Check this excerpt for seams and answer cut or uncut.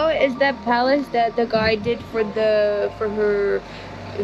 uncut